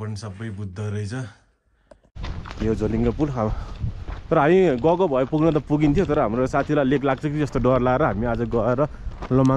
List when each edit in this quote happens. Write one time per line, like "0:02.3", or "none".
0:02.3

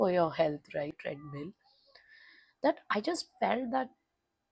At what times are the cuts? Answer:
0:01.1

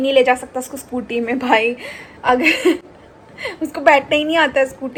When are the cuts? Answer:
none

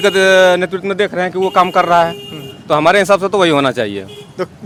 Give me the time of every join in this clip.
none

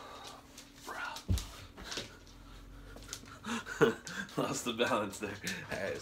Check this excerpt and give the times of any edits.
none

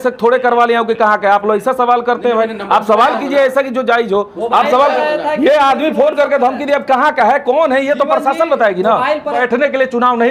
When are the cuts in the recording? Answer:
0:09.4

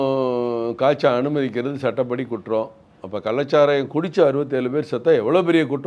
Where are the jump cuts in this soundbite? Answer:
none

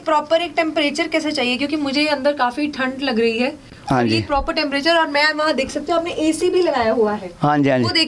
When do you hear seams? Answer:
none

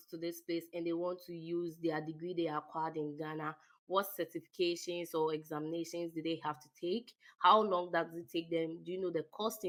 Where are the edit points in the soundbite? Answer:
none

